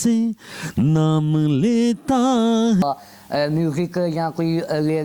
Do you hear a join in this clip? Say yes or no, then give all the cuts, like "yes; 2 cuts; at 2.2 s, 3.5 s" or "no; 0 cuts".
yes; 1 cut; at 2.8 s